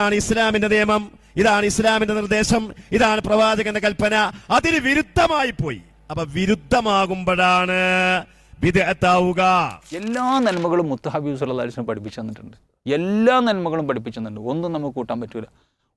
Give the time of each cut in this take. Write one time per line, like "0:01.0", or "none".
0:10.1